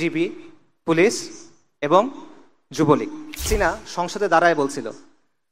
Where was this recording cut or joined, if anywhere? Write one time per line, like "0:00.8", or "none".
0:03.5